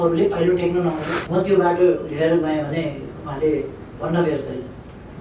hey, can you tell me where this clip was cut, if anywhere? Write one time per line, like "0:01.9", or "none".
0:01.2